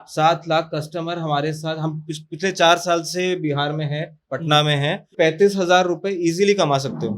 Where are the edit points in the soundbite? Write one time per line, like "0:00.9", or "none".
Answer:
0:05.1

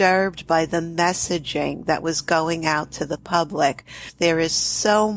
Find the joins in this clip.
0:04.1

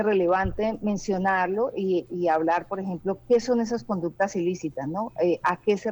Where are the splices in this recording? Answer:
none

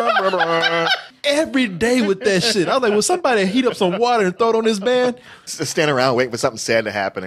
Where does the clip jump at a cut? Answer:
0:01.1
0:05.5

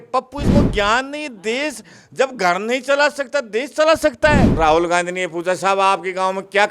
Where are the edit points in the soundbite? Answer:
0:04.5

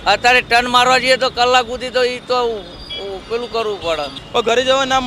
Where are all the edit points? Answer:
0:04.2

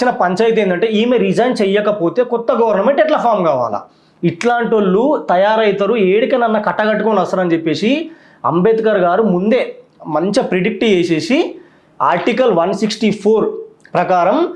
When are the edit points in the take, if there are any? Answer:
none

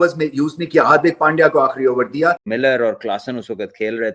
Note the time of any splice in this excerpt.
0:02.5

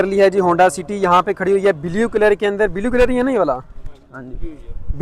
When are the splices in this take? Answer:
none

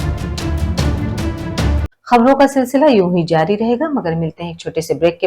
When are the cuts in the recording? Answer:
0:01.8

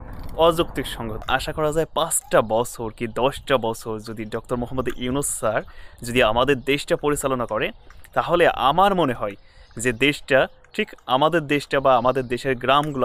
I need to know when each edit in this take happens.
0:01.3

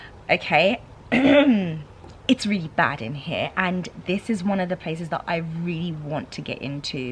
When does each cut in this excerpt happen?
none

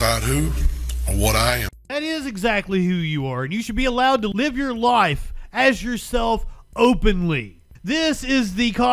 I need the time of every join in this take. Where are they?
0:01.8
0:04.3
0:07.7

